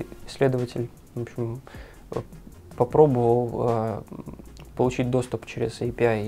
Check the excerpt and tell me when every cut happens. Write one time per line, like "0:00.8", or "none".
none